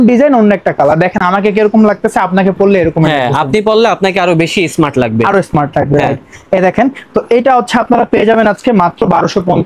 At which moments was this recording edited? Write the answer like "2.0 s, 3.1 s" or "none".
none